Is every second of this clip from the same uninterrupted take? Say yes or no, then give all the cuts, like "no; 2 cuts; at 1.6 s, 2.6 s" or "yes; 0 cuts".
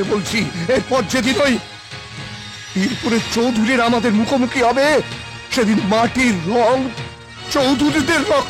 yes; 0 cuts